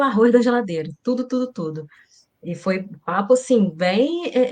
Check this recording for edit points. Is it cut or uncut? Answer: uncut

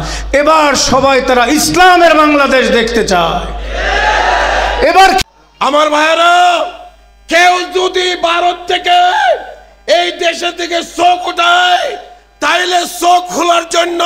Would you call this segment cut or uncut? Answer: cut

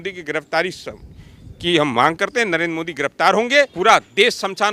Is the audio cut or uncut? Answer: cut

